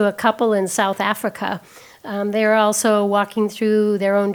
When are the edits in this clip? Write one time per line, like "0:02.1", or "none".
none